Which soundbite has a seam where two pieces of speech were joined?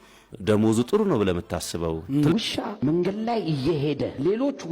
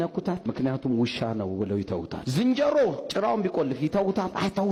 first; 1 cut; at 2.3 s

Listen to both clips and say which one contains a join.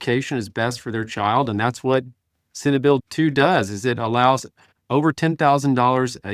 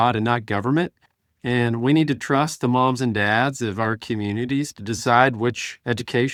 first; 1 cut; at 3.0 s

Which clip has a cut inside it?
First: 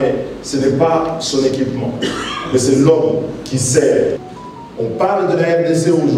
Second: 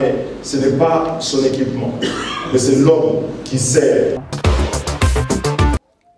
first; 1 cut; at 4.3 s

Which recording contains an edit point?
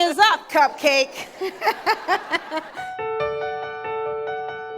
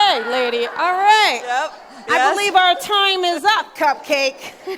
first; 1 cut; at 2.9 s

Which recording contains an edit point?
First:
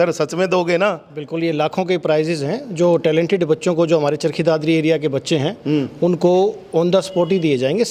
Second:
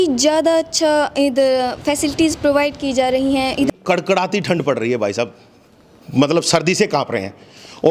second; 1 cut; at 3.7 s

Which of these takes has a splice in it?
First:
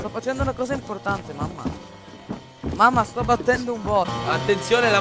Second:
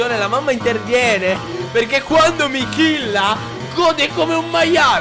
second; 1 cut; at 1.5 s

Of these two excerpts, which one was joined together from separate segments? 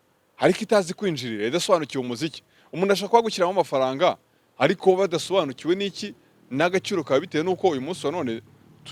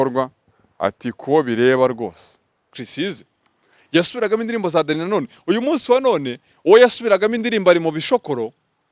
second; 1 cut; at 2.8 s

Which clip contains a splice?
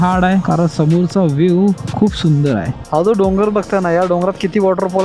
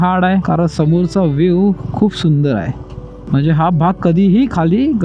first; 1 cut; at 2.8 s

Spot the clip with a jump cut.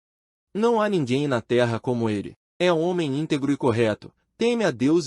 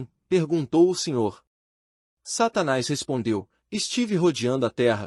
first; 1 cut; at 2.4 s

